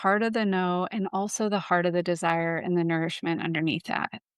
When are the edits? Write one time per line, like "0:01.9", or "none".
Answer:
none